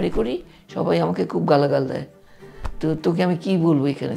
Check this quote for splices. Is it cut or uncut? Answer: uncut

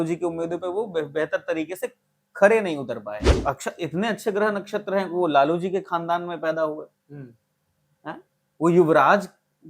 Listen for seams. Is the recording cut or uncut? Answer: cut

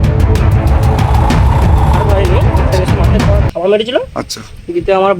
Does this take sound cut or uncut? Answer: cut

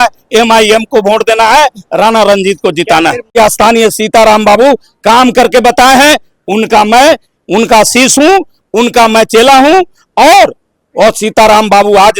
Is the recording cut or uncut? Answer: cut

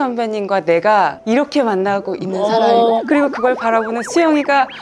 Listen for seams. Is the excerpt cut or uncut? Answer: cut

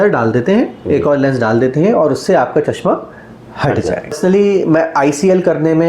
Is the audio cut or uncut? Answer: cut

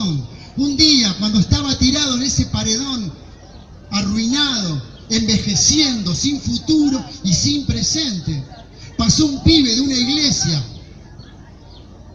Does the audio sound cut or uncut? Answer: uncut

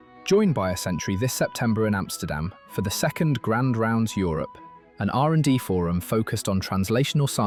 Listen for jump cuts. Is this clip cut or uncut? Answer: uncut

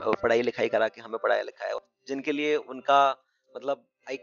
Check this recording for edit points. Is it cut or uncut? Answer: cut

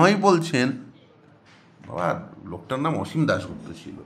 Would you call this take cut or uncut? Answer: uncut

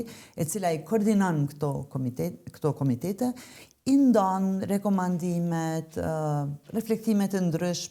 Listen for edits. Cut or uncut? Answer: uncut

